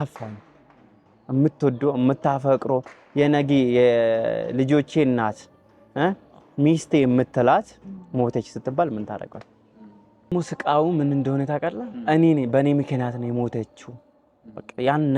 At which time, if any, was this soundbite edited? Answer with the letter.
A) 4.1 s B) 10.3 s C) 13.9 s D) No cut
B